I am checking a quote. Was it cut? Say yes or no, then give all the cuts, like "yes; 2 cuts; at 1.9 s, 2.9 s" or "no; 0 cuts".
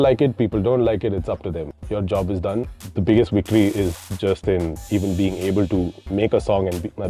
yes; 2 cuts; at 4.1 s, 4.8 s